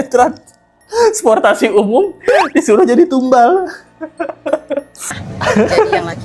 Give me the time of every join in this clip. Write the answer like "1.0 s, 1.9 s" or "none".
5.2 s